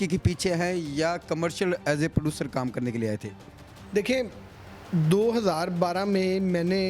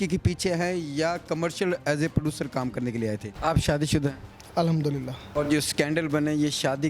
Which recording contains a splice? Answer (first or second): second